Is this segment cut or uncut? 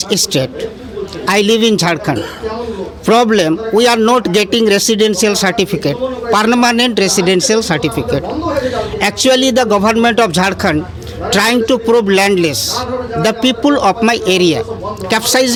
uncut